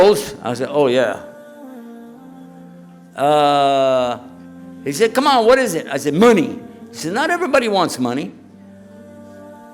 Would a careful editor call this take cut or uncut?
cut